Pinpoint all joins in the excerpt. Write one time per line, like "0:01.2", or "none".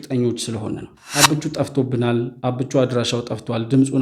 0:01.0